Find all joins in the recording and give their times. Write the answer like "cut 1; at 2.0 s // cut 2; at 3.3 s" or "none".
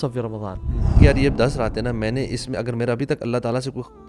cut 1; at 1.0 s